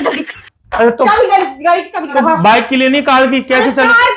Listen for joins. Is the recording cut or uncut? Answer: cut